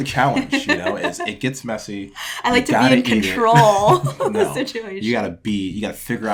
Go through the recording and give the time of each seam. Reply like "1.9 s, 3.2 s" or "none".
none

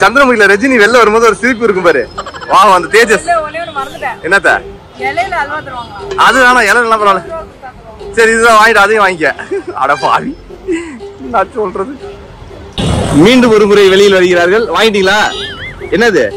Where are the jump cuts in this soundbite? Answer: none

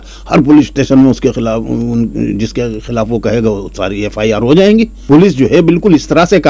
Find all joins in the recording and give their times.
5.0 s

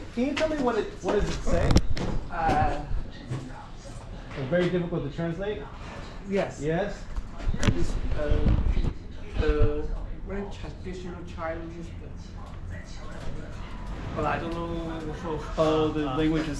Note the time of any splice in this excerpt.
none

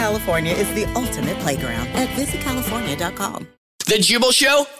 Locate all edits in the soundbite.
3.8 s

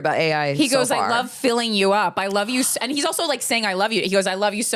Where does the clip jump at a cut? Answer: none

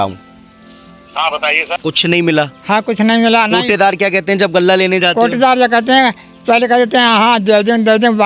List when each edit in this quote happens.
1.7 s

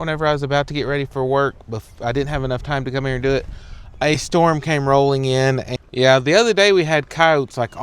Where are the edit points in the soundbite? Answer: 5.7 s

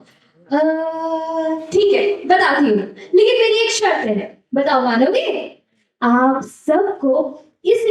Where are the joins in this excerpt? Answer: 5.8 s

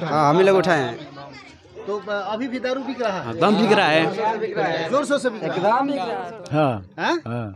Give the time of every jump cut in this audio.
6.1 s

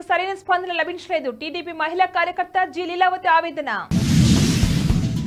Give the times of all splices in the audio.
none

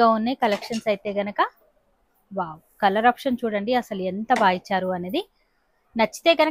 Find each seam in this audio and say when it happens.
none

